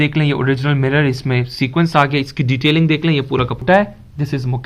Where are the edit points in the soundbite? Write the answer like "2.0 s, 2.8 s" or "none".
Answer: 3.6 s